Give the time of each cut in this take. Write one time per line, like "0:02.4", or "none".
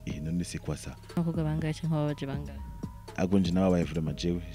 0:01.2